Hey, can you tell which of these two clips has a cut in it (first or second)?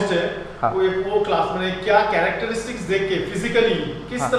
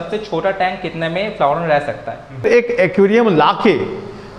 second